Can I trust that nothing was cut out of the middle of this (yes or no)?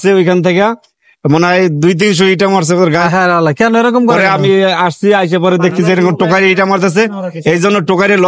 yes